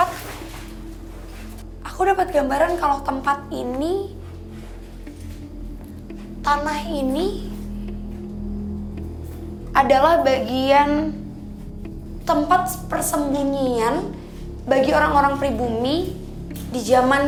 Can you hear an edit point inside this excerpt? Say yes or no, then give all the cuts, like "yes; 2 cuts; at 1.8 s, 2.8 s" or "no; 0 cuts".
no; 0 cuts